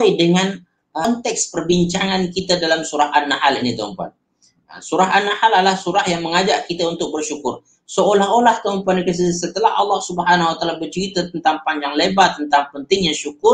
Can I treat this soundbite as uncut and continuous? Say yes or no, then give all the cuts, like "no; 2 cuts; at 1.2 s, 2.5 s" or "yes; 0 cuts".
no; 1 cut; at 1.1 s